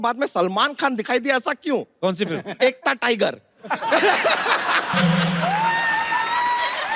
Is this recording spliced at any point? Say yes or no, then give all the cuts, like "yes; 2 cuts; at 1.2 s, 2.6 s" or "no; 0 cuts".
no; 0 cuts